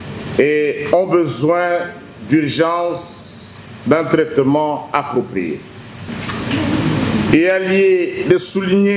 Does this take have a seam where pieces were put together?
yes; 1 cut; at 6.0 s

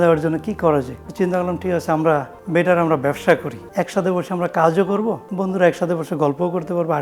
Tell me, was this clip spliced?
yes; 4 cuts; at 1.0 s, 2.4 s, 3.6 s, 5.2 s

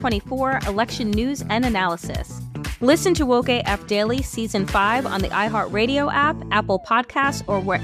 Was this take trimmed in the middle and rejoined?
no; 0 cuts

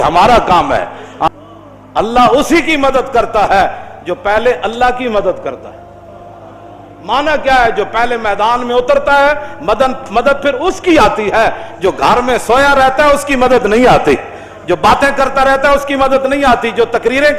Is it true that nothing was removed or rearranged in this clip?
no; 1 cut; at 1.3 s

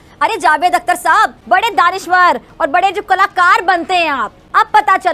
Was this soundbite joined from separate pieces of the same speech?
yes; 1 cut; at 1.4 s

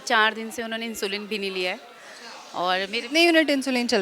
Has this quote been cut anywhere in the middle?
no; 0 cuts

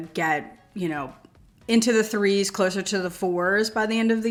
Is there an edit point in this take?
no; 0 cuts

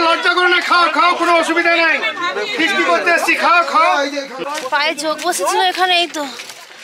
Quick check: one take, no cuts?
no; 1 cut; at 4.3 s

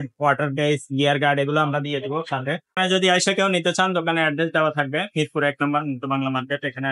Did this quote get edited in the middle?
yes; 1 cut; at 2.7 s

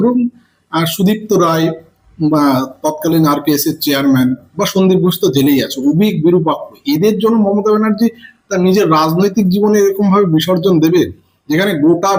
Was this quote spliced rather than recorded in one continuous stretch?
no; 0 cuts

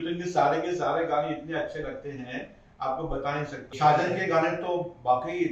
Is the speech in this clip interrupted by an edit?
yes; 1 cut; at 3.7 s

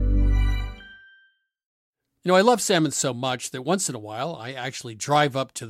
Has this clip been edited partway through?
yes; 1 cut; at 1.7 s

